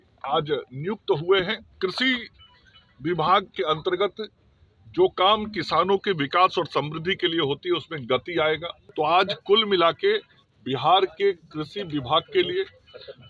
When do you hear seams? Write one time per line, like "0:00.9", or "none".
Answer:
0:01.7
0:08.8